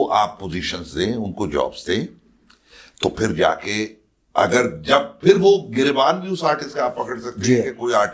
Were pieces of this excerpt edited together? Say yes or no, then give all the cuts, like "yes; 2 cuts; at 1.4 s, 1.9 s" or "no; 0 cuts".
no; 0 cuts